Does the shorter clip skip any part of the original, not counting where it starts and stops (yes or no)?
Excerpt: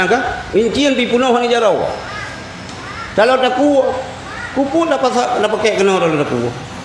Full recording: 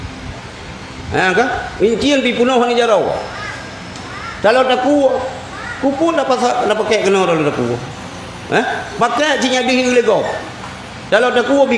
no